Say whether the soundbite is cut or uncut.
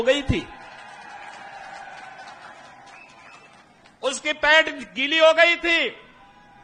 uncut